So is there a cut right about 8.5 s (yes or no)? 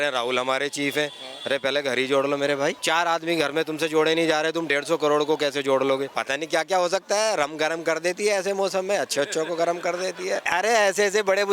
no